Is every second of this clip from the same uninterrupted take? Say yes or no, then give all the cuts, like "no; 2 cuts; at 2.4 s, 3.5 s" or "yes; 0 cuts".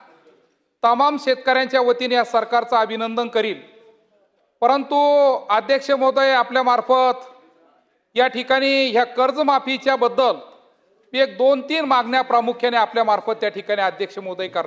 yes; 0 cuts